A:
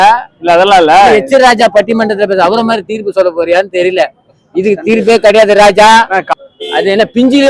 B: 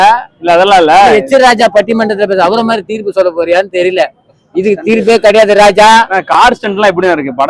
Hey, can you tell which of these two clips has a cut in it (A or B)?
A